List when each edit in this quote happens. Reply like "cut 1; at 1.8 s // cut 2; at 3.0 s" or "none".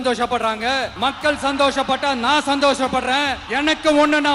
cut 1; at 0.9 s // cut 2; at 3.4 s